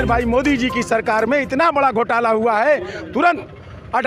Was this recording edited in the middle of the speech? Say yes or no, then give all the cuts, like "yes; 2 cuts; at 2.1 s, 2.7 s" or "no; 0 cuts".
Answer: no; 0 cuts